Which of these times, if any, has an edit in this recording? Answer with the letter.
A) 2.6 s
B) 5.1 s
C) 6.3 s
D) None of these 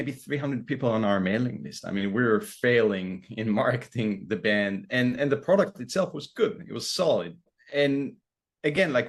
D